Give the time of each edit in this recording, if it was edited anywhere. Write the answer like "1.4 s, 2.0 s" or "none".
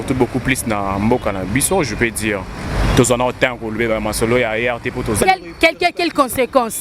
5.2 s